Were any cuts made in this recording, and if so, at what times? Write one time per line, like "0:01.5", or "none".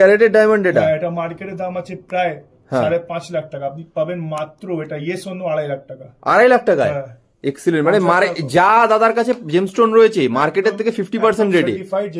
none